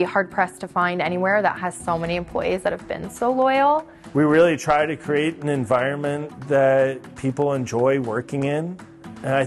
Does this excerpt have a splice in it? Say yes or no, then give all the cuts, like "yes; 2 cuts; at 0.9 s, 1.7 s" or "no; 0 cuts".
yes; 1 cut; at 4.0 s